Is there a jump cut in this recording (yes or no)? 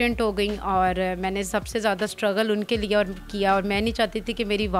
no